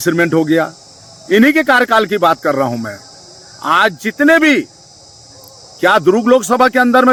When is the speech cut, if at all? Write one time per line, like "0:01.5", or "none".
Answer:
none